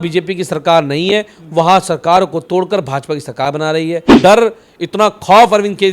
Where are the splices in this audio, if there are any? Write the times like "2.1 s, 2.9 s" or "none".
4.2 s